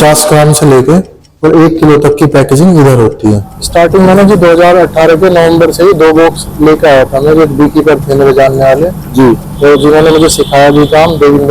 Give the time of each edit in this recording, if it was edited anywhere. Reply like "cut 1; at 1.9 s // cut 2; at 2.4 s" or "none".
cut 1; at 3.5 s